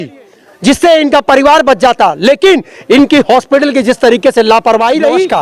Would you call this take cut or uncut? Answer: uncut